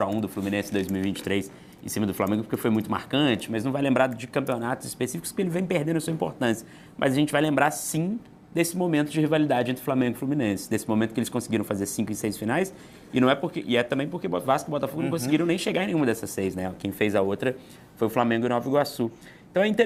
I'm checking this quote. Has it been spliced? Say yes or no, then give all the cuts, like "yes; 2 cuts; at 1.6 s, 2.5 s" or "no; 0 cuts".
no; 0 cuts